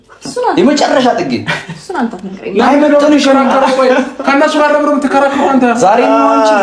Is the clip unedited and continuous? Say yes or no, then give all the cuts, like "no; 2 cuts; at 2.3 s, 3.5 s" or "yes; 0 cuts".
yes; 0 cuts